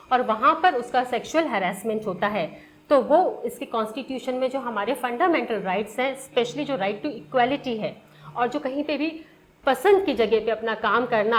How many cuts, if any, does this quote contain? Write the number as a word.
zero